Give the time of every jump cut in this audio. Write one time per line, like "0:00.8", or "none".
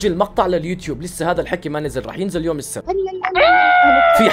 0:02.7